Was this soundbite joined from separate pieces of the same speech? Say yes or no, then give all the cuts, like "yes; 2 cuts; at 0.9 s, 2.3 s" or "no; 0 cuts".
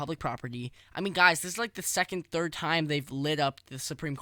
no; 0 cuts